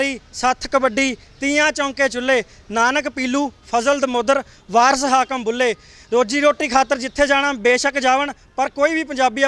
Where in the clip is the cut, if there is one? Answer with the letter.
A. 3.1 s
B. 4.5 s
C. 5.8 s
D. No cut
D